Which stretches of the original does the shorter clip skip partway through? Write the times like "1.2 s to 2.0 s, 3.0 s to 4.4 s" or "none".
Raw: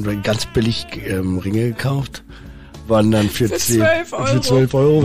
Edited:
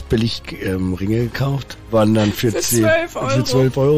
2.2 s to 2.7 s